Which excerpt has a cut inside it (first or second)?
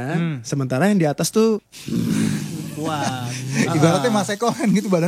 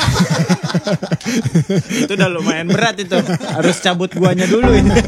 first